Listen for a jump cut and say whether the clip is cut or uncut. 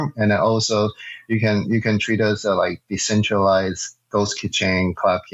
uncut